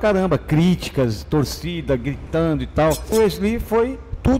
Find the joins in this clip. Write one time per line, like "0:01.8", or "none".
0:03.1